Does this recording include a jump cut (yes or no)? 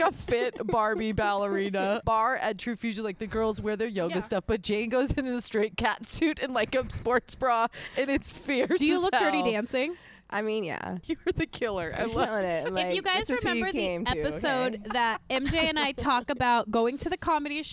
yes